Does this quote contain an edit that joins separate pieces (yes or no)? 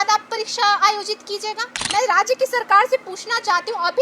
yes